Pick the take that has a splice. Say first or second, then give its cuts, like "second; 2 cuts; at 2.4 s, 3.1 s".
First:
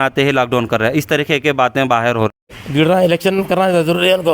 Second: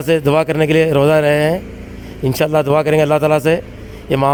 first; 1 cut; at 2.4 s